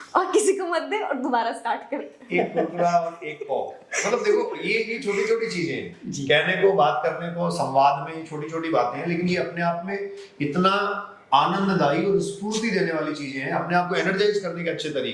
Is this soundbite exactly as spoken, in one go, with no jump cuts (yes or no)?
yes